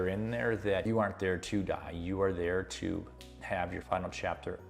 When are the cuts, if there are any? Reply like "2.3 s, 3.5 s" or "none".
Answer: 0.8 s, 3.8 s